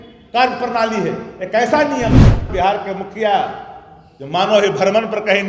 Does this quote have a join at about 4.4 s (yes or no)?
no